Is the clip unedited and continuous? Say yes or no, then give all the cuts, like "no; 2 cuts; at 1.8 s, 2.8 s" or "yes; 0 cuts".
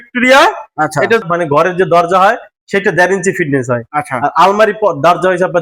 no; 1 cut; at 1.3 s